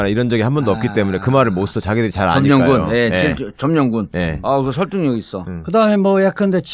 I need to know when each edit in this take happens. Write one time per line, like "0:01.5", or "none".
none

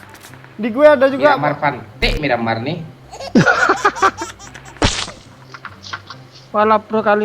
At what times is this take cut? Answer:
0:05.5

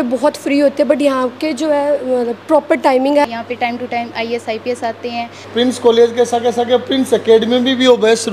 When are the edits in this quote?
0:03.2
0:05.4

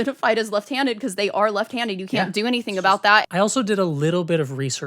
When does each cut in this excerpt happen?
0:03.3

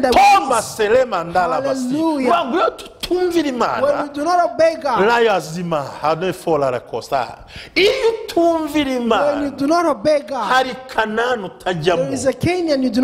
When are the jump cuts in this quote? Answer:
none

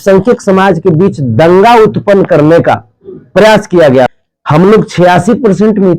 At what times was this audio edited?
0:04.1

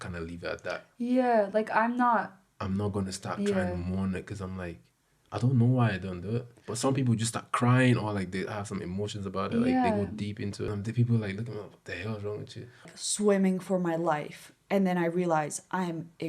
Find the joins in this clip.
0:10.7
0:12.9

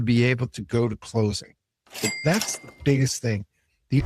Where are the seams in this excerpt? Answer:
0:02.2

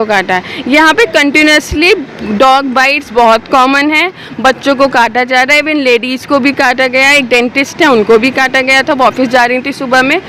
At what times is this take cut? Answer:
none

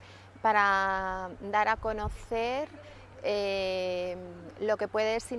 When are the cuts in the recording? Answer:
none

